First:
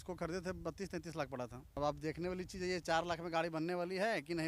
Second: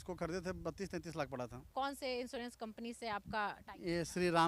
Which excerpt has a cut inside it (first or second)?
first